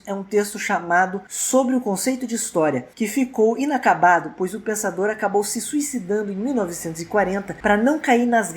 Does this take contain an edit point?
no; 0 cuts

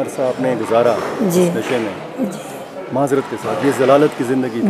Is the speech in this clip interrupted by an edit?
no; 0 cuts

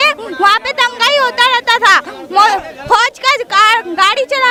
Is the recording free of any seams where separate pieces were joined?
yes; 0 cuts

